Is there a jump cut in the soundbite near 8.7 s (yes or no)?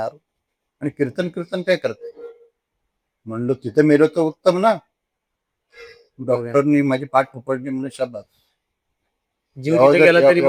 no